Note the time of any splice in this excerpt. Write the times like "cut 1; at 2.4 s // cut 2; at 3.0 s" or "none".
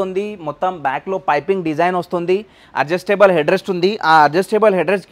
none